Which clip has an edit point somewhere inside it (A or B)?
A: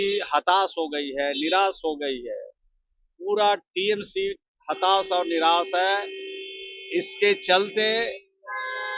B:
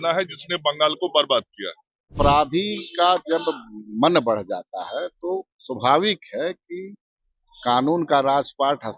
B